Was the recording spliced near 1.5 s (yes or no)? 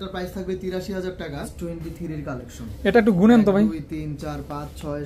yes